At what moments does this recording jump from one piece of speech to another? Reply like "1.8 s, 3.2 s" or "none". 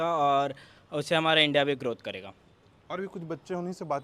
none